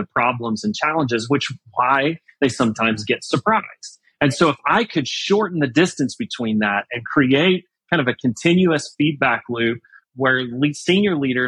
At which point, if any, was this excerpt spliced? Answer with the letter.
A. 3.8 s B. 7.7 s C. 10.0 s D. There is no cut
C